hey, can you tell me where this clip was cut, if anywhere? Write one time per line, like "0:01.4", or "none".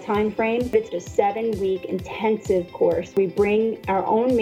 0:01.0
0:03.1